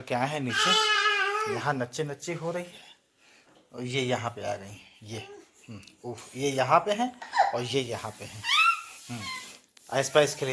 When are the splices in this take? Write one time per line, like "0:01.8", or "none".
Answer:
none